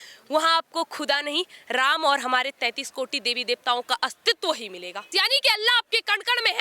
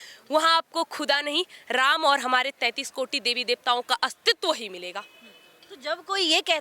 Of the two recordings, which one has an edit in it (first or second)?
first